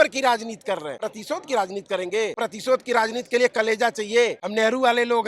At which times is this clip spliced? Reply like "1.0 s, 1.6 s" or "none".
0.9 s, 2.3 s, 4.4 s